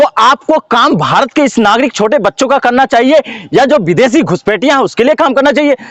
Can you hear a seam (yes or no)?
no